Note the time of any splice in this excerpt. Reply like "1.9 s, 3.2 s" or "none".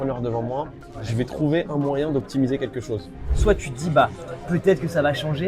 3.3 s